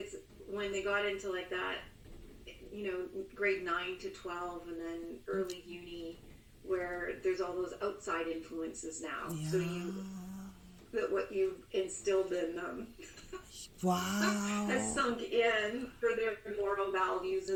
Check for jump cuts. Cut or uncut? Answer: uncut